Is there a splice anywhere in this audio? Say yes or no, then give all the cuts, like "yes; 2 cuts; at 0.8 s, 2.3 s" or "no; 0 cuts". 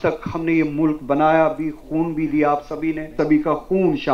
yes; 1 cut; at 3.2 s